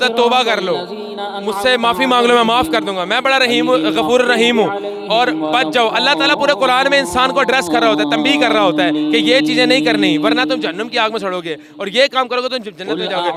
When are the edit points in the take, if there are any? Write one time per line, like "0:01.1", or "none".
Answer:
none